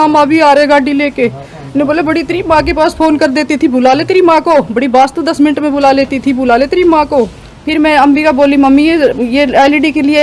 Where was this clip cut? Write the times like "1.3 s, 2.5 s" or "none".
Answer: 7.4 s